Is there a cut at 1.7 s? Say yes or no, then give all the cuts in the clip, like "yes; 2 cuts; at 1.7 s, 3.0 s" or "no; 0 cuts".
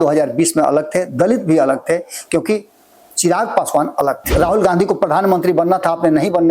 no; 1 cut; at 4.2 s